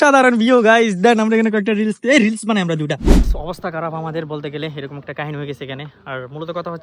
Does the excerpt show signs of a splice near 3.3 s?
yes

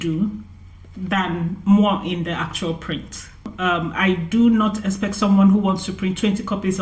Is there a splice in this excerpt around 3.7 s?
yes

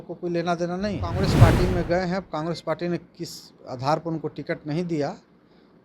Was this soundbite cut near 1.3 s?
yes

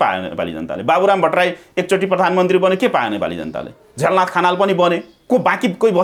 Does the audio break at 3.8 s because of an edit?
no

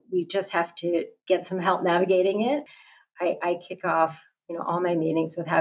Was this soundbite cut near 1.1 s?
yes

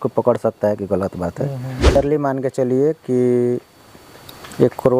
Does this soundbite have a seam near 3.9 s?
no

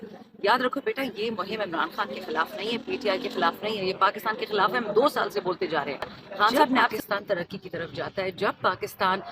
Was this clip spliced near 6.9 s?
yes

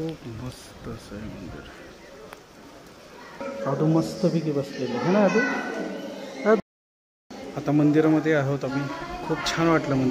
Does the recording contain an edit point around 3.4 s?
yes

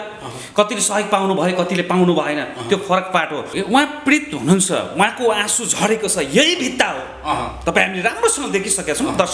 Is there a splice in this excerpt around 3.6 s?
yes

